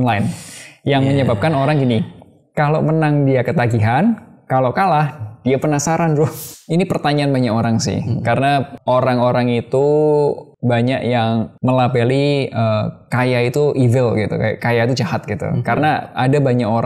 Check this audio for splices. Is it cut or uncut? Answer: cut